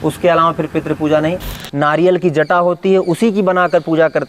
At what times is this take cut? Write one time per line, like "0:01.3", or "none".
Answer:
0:01.6